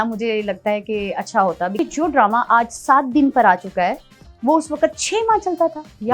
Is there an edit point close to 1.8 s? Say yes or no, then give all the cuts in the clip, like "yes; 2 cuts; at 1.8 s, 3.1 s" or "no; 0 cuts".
yes; 1 cut; at 1.8 s